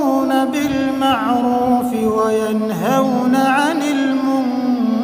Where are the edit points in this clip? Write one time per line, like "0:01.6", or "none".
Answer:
none